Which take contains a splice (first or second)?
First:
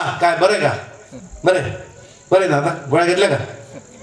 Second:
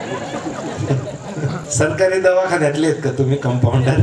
second